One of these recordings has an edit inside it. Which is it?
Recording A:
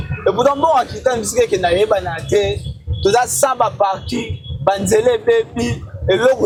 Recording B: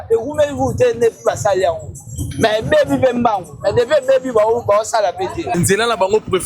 B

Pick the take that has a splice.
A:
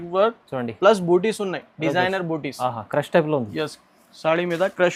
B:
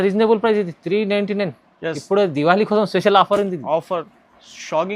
B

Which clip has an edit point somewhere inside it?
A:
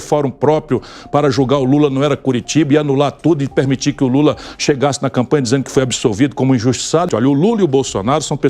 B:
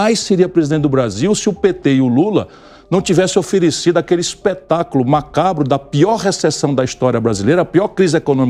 A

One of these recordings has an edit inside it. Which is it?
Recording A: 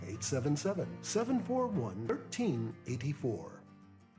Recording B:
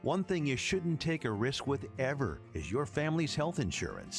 A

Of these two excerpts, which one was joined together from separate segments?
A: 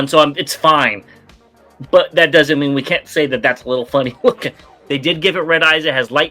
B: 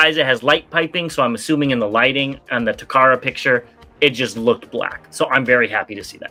A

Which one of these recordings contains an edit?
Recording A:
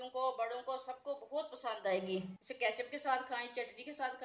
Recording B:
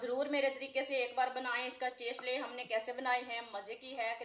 A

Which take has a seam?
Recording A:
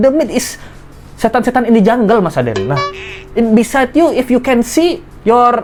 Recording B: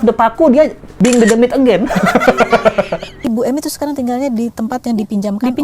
B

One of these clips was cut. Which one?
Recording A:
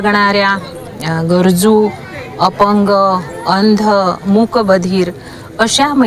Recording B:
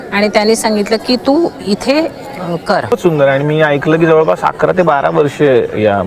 B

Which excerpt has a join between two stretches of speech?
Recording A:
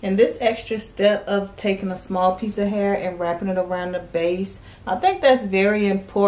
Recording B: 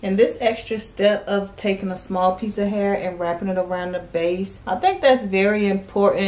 B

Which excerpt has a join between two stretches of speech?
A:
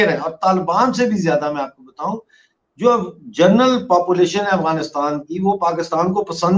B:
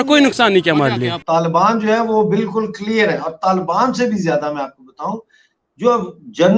B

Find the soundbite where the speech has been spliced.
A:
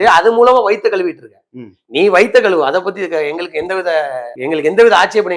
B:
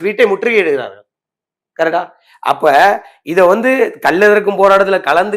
A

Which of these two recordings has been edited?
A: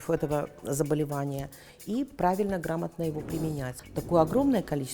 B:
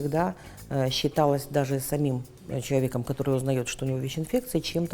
A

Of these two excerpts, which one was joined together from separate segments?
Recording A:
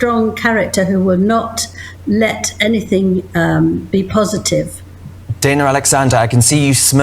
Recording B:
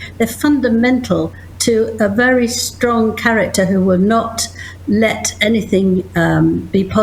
A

